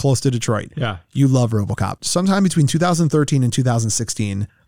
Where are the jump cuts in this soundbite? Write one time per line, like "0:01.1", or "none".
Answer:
0:02.0